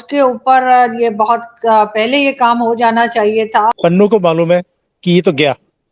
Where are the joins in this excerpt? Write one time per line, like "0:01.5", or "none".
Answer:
0:03.7